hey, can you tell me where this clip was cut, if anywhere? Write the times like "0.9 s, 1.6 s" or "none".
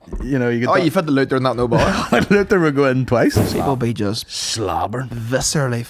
3.4 s